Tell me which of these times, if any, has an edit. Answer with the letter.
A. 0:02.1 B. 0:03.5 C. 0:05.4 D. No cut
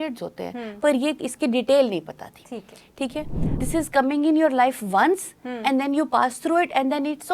B